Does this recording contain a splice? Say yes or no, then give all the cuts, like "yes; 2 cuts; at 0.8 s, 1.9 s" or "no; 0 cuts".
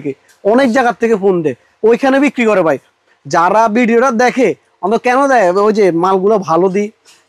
no; 0 cuts